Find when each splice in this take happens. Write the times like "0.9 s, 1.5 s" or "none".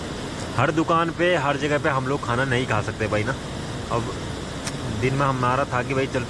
none

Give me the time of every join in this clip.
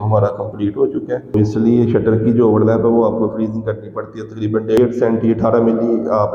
1.3 s, 4.8 s

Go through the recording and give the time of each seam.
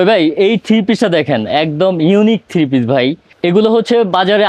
none

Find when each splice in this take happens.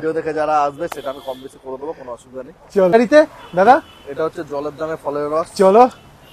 2.9 s

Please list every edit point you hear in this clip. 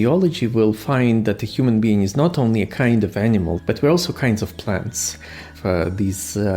3.6 s, 5.5 s

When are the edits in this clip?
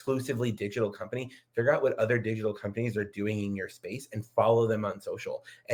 none

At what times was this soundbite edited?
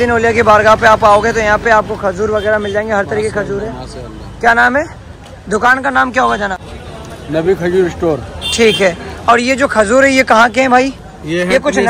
none

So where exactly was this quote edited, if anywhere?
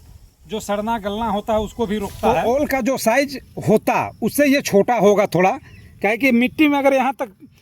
2.3 s

